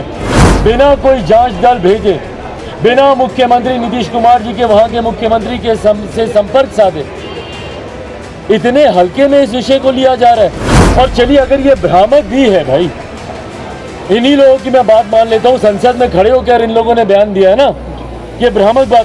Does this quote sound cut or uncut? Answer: uncut